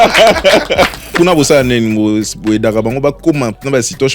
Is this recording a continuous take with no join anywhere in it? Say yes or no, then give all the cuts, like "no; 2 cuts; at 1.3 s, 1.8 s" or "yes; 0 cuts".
no; 1 cut; at 1.0 s